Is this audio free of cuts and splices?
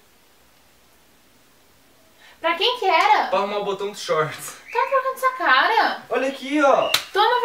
no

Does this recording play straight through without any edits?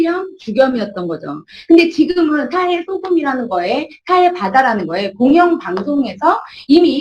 yes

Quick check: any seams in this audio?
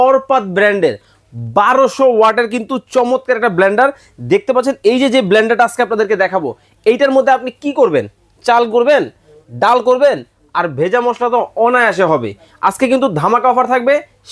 no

